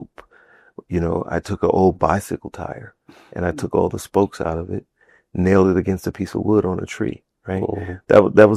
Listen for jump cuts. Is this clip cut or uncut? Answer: uncut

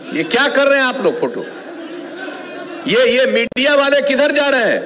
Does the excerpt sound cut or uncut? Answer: uncut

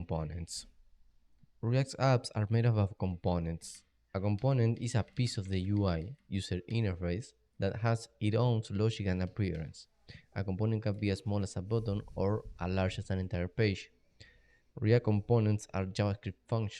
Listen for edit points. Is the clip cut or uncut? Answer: cut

